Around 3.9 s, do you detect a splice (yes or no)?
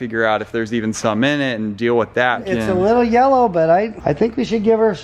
yes